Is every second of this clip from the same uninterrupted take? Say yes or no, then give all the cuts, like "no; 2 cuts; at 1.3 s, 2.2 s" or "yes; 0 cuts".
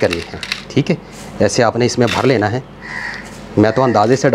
yes; 0 cuts